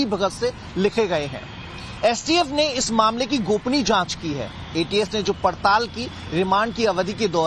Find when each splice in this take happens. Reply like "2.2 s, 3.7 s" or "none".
none